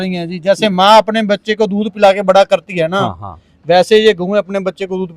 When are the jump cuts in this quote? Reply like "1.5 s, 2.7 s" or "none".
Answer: none